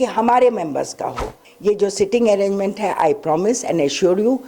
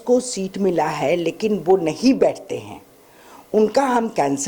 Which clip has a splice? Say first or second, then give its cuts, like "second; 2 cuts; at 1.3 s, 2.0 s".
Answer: first; 1 cut; at 1.4 s